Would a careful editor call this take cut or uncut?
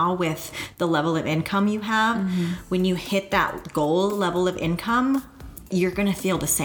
cut